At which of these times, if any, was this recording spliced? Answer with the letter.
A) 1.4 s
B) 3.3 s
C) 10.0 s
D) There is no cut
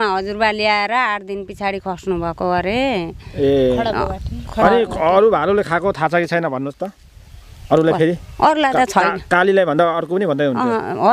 D